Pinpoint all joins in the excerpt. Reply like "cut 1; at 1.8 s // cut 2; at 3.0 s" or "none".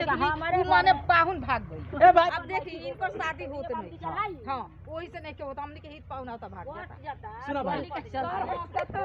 cut 1; at 2.3 s